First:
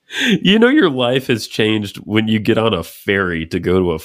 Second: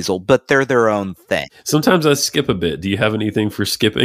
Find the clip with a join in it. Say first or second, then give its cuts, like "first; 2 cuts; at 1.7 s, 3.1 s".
second; 1 cut; at 1.4 s